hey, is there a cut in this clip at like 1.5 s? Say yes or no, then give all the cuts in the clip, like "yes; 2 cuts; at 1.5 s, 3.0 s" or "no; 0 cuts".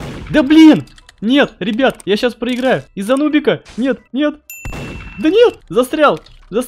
no; 3 cuts; at 2.9 s, 4.0 s, 5.6 s